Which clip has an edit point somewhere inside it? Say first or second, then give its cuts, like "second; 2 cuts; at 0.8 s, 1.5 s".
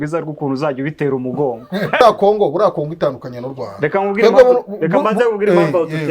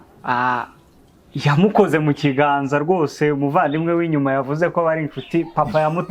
first; 1 cut; at 2.0 s